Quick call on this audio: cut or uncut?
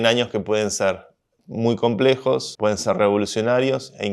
cut